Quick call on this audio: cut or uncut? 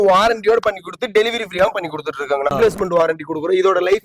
cut